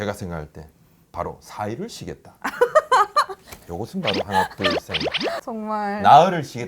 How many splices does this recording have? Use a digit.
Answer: 1